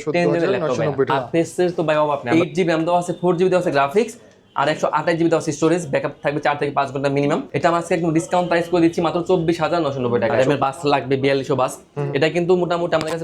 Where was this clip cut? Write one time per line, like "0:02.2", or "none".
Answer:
0:01.1
0:02.2
0:07.5
0:10.3